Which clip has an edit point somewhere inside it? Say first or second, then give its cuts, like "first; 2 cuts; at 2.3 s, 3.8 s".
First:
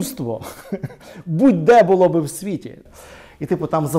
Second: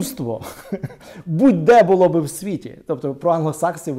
first; 1 cut; at 2.7 s